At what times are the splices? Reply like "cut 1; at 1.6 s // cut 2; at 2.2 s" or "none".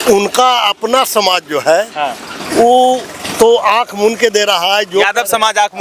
none